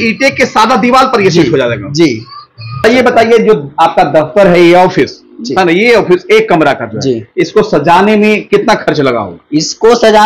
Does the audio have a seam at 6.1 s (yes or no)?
no